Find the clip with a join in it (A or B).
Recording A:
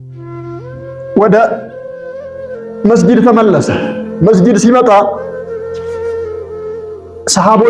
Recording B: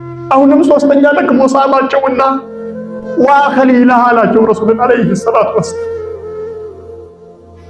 A